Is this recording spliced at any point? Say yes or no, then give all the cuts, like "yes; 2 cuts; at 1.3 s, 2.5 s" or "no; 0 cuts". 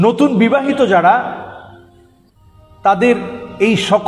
no; 0 cuts